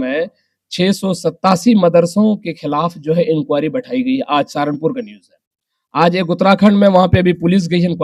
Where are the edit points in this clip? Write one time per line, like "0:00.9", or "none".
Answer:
none